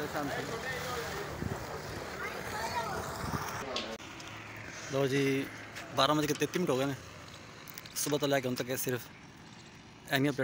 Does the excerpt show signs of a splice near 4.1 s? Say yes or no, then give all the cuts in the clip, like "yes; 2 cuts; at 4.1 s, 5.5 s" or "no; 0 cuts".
yes; 1 cut; at 4.1 s